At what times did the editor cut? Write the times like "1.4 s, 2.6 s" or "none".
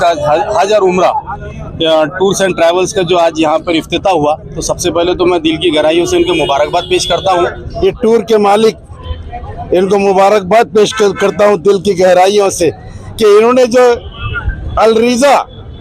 7.6 s